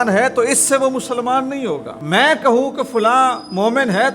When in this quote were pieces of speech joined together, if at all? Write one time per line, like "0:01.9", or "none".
0:01.9